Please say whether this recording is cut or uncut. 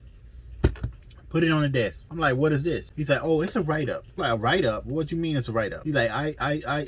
cut